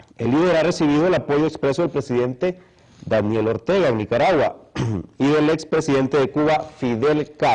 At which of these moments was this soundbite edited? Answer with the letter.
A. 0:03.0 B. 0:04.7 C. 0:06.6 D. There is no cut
A